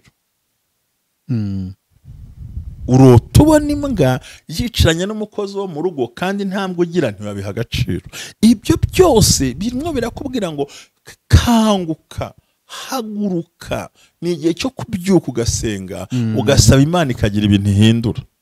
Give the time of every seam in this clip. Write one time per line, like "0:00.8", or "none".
none